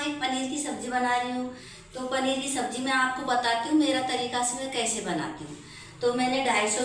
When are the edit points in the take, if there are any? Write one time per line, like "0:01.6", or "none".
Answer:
none